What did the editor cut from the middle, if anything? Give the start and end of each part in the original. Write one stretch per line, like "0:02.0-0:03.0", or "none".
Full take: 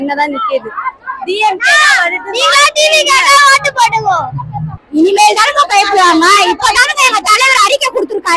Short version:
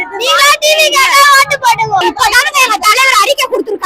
0:04.2-0:06.5